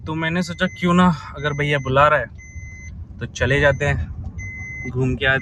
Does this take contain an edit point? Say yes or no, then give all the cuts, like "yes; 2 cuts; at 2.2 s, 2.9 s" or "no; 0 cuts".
no; 0 cuts